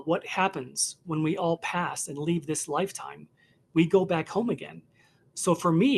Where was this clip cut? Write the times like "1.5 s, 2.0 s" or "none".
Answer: none